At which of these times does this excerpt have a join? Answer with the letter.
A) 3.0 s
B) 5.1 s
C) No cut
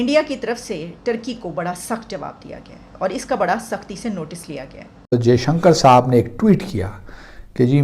B